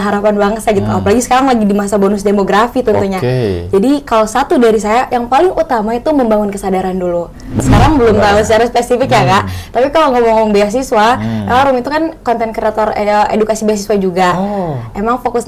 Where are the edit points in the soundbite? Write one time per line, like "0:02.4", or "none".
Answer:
0:07.6

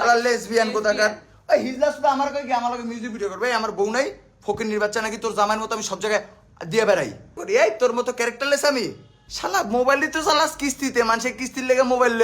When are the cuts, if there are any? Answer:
0:07.4
0:09.1

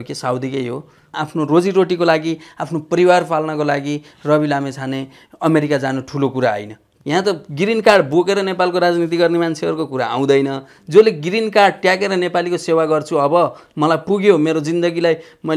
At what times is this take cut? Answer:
0:01.1
0:06.8

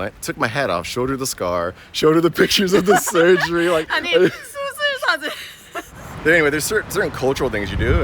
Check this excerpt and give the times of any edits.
0:06.0

